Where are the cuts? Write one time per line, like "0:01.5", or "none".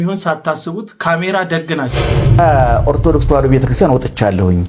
0:02.4